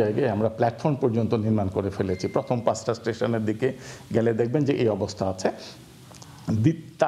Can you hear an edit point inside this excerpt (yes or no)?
no